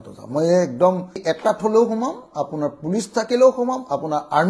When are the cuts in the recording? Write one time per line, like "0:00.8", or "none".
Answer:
0:01.1